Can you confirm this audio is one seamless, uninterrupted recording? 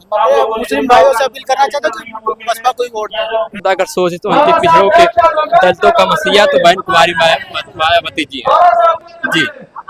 no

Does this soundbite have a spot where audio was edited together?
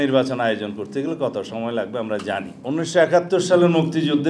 yes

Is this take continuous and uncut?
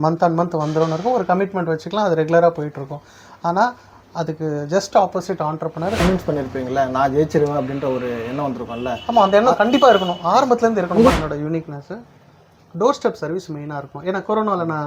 no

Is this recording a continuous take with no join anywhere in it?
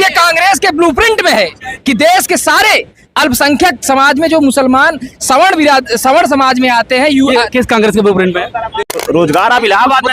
no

